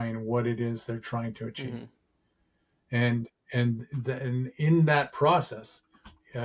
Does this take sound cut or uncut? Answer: uncut